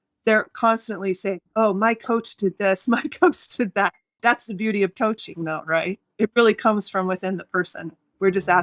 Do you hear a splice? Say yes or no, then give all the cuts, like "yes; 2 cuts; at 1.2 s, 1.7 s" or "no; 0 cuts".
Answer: yes; 2 cuts; at 4.0 s, 6.0 s